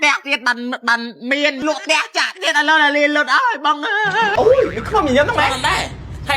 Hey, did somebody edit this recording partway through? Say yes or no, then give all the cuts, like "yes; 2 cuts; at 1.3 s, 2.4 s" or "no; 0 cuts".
yes; 2 cuts; at 1.6 s, 4.3 s